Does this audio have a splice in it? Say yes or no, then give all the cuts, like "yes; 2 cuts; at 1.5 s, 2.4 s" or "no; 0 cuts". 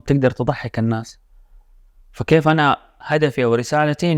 no; 0 cuts